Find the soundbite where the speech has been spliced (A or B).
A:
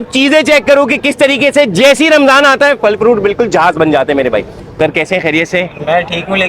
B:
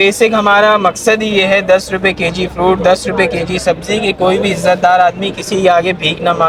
A